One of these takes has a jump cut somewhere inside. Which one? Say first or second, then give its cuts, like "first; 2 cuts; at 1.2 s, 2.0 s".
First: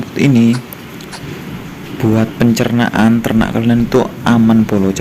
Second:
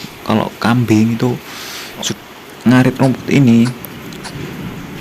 second; 1 cut; at 2.1 s